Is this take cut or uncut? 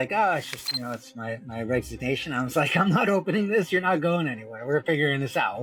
uncut